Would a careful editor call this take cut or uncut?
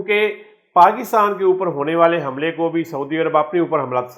uncut